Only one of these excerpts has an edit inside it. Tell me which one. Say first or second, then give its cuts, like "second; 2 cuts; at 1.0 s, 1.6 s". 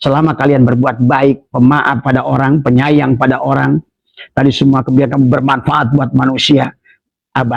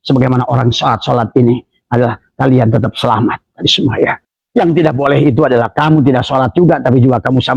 second; 1 cut; at 4.3 s